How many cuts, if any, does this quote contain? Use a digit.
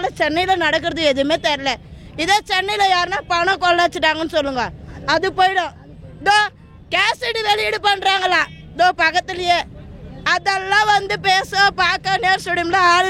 0